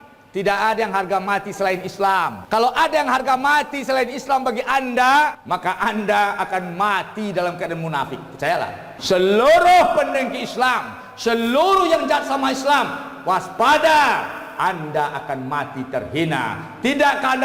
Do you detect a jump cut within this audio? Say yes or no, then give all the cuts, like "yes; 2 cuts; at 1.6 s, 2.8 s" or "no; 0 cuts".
yes; 3 cuts; at 2.4 s, 5.4 s, 8.9 s